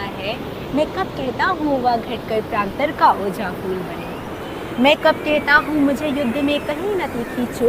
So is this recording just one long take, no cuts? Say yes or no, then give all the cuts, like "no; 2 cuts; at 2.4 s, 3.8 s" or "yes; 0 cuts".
yes; 0 cuts